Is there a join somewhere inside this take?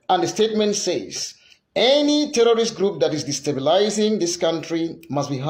no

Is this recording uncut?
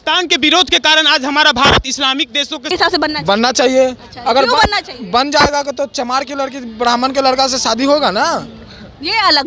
no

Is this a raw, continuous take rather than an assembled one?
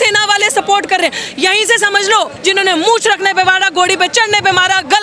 no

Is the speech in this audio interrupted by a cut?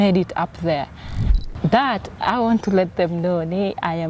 yes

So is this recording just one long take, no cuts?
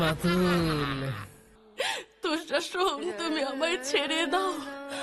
no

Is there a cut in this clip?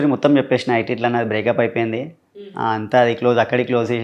no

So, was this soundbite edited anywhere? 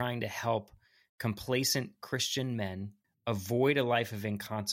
yes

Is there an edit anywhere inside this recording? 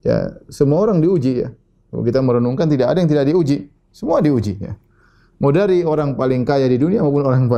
no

